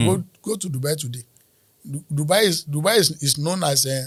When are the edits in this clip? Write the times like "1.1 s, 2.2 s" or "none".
none